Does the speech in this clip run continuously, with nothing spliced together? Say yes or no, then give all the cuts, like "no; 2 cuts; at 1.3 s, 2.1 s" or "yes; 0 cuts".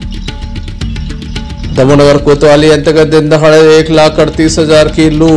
no; 1 cut; at 0.9 s